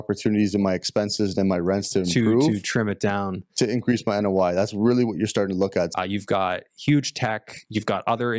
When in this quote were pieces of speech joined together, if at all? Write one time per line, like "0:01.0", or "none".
0:05.9